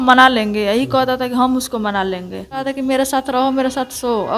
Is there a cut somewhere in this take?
yes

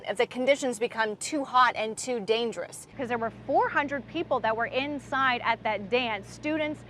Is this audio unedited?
no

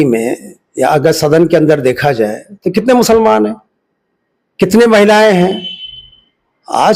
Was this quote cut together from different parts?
no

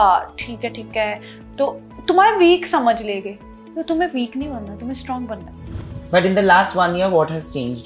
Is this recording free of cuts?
no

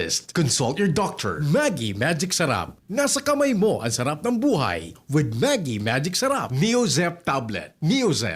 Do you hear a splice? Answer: yes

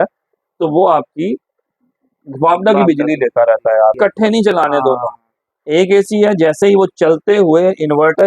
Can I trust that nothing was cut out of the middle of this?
no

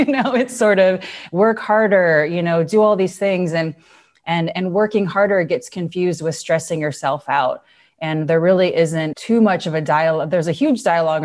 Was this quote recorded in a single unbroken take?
yes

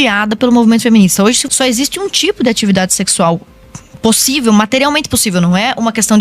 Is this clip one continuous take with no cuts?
no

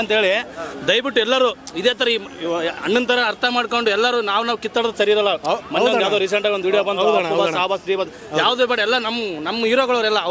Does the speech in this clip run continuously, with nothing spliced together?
yes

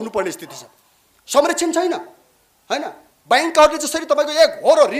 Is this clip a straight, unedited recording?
yes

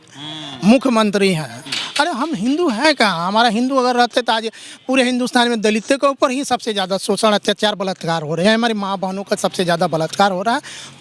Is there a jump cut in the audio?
yes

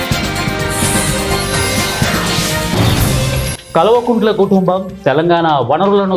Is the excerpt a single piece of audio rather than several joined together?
no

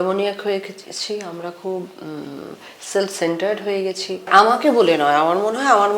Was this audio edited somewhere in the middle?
yes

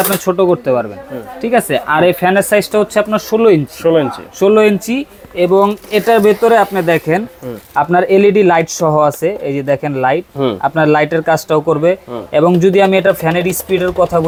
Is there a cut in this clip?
no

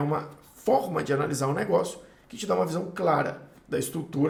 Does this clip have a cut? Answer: no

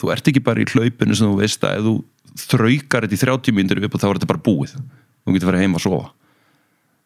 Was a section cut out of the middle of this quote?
no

